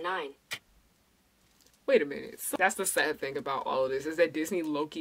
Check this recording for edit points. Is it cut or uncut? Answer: cut